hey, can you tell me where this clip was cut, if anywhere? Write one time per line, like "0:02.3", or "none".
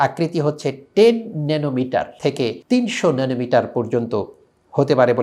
none